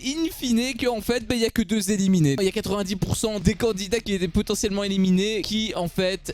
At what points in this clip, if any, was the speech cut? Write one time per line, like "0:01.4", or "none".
0:02.4

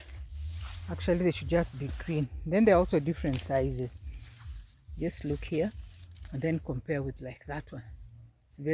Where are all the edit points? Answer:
none

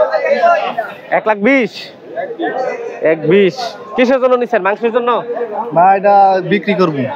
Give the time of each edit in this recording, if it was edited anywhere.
none

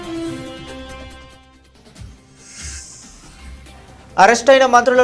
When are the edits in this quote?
0:02.1
0:04.2

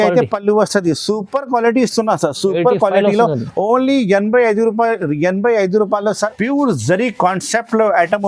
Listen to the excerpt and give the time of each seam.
0:06.2

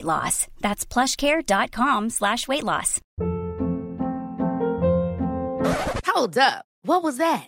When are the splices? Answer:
0:03.0

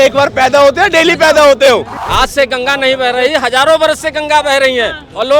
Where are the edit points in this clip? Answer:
0:02.0

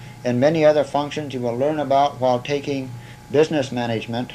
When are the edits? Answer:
0:01.2

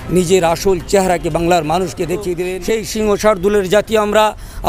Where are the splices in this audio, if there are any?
0:02.5

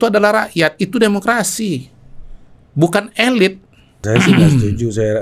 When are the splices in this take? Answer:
0:04.0

